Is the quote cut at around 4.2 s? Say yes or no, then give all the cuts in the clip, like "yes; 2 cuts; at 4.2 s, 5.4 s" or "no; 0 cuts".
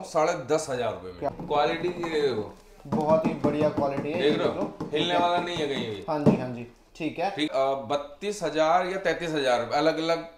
no; 2 cuts; at 1.3 s, 7.5 s